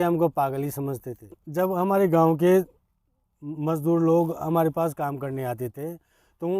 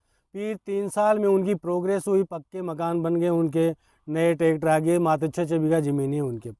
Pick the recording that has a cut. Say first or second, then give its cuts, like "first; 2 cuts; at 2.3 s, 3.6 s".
first; 1 cut; at 1.3 s